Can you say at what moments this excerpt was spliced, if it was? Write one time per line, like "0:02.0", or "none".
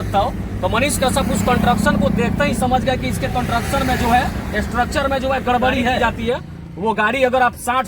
0:06.0